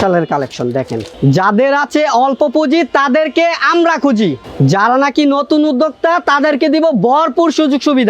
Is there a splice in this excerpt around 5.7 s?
no; 2 cuts; at 1.0 s, 4.4 s

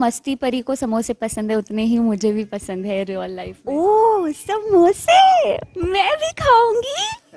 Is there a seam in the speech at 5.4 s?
no; 1 cut; at 3.5 s

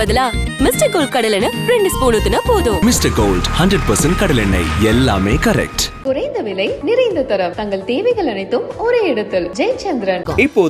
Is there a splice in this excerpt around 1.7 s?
no; 0 cuts

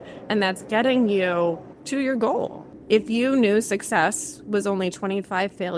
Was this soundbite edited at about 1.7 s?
yes; 2 cuts; at 1.7 s, 2.7 s

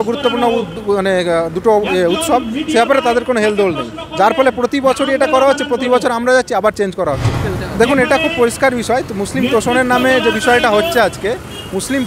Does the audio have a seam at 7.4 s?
yes; 1 cut; at 7.4 s

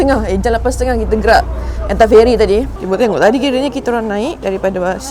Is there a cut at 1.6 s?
no; 1 cut; at 2.8 s

